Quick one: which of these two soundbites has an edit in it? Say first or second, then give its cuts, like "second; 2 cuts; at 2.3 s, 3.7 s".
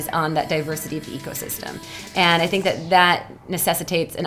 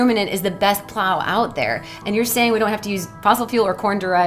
second; 1 cut; at 3.2 s